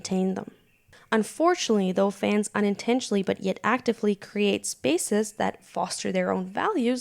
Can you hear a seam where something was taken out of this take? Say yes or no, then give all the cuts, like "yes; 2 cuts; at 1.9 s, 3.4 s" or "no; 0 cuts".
yes; 1 cut; at 0.9 s